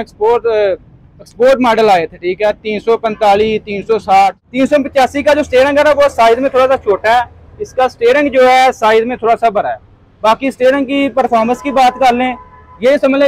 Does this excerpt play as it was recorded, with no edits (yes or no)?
no